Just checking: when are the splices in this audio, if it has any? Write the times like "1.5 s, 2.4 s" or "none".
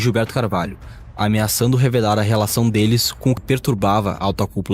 3.4 s